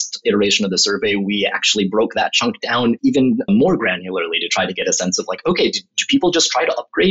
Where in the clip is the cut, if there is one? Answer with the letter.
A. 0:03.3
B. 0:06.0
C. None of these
A